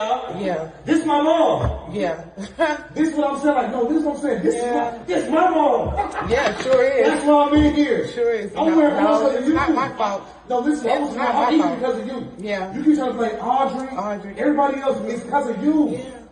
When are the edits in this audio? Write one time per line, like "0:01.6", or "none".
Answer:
none